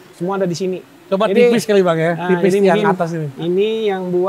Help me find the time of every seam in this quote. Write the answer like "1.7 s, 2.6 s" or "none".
3.2 s